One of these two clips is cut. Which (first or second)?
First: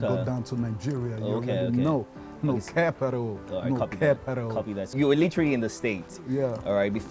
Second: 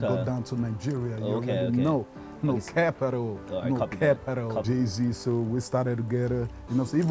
second